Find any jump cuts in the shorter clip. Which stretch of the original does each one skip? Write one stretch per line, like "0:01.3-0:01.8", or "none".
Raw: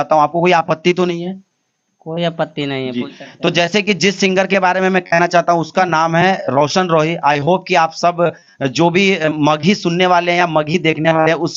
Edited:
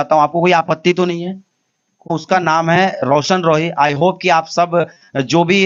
0:02.1-0:05.6